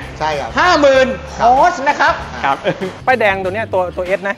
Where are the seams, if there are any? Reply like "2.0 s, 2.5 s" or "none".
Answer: 2.9 s